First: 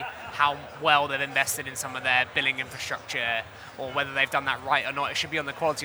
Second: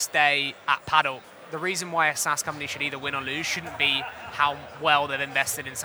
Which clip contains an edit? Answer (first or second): second